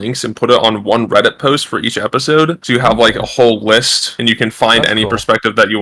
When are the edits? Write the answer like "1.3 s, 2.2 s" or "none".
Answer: none